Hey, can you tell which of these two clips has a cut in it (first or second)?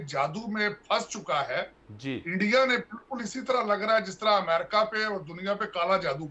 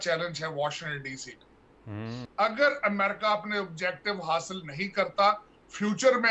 second